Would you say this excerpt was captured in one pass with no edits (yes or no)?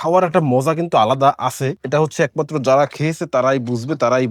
yes